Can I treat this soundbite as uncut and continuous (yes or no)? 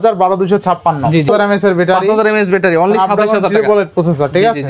no